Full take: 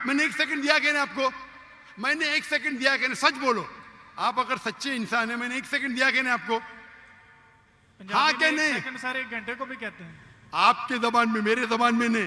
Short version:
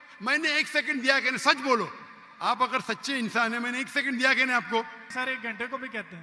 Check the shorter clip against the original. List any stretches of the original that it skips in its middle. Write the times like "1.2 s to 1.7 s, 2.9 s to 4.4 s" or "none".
6.8 s to 8.9 s